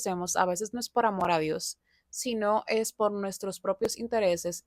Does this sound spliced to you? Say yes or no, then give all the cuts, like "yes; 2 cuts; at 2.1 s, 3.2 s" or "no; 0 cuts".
no; 0 cuts